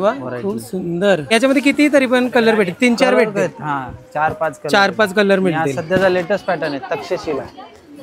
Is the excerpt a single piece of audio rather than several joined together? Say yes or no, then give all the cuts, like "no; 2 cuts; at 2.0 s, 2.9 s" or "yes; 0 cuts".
no; 1 cut; at 1.3 s